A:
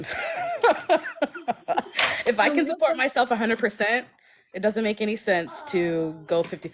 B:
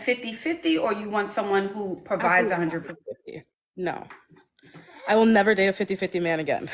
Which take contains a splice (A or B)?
A